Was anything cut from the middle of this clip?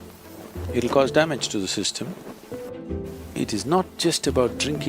yes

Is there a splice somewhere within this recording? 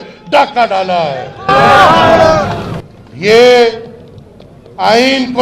no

